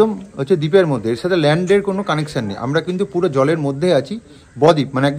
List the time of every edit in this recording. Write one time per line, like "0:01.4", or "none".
none